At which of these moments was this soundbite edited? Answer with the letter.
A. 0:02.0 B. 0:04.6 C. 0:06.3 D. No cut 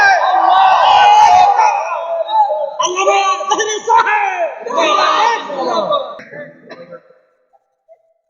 C